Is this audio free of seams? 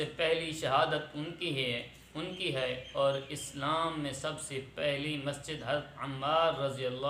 yes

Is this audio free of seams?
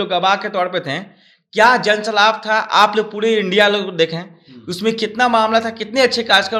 yes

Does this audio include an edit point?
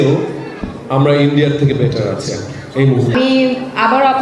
yes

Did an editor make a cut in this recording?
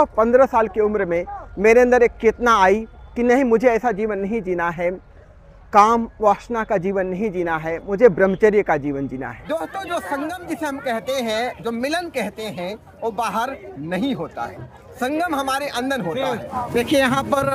yes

